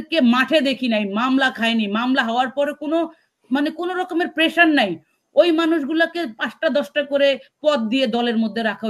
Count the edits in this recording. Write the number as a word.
zero